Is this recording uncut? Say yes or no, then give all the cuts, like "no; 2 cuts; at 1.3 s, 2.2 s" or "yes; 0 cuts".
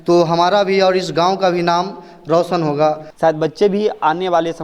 no; 1 cut; at 3.1 s